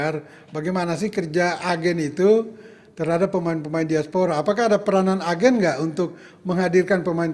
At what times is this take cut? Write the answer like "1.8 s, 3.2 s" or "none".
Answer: none